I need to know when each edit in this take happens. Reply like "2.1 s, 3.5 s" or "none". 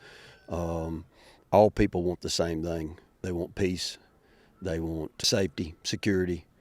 3.2 s, 5.1 s